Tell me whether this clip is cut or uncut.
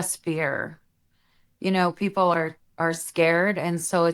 uncut